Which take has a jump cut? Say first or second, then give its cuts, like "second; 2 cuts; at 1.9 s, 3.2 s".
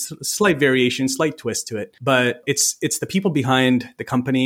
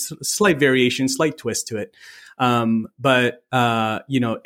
first; 1 cut; at 2.4 s